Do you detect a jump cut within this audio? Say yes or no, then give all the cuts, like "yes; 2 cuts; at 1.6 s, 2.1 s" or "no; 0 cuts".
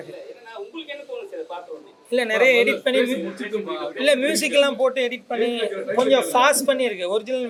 no; 0 cuts